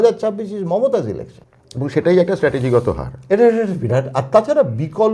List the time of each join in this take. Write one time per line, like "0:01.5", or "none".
0:01.3